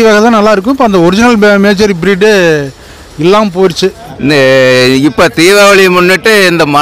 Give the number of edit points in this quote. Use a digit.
1